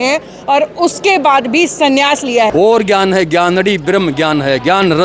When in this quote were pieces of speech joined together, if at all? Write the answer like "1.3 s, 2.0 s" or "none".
2.5 s